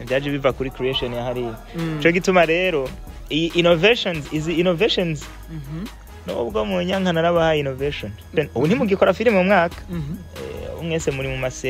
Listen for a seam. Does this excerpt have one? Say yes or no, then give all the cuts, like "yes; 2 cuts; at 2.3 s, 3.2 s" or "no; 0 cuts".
yes; 1 cut; at 8.3 s